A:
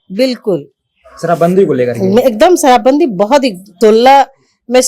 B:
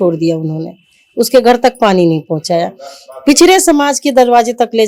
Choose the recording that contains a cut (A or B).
A